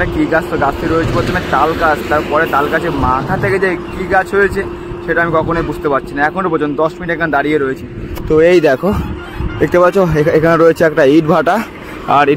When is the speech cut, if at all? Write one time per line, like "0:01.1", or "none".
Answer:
none